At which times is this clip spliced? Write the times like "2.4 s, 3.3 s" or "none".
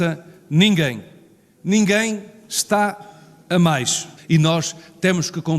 4.1 s